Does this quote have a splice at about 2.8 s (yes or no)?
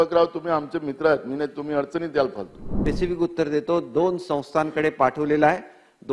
yes